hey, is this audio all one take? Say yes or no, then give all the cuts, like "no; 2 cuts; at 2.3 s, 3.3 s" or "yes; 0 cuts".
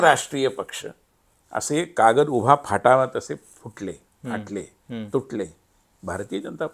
yes; 0 cuts